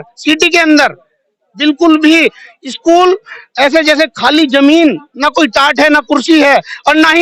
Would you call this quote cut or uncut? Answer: uncut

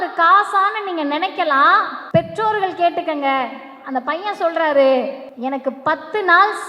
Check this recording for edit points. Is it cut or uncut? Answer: cut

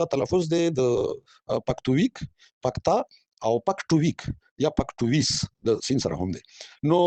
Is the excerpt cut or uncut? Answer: uncut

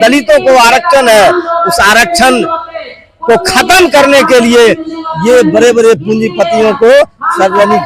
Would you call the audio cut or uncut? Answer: uncut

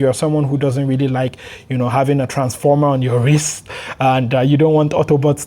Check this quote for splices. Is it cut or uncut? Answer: uncut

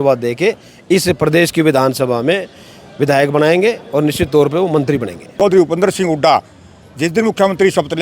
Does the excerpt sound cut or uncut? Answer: cut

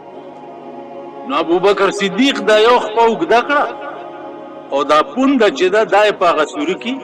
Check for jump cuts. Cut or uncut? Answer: uncut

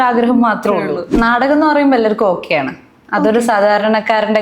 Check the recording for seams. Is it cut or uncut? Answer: cut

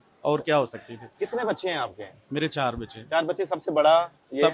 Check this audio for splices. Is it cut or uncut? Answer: uncut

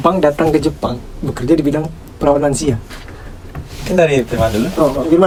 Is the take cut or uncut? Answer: uncut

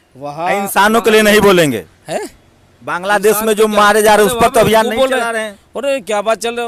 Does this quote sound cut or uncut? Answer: uncut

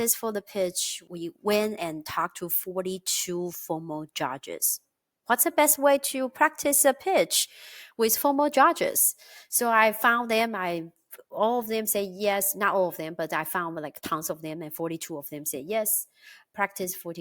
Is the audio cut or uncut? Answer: cut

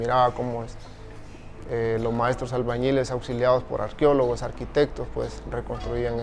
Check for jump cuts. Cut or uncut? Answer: uncut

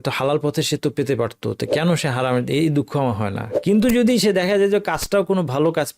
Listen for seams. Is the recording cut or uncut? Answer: cut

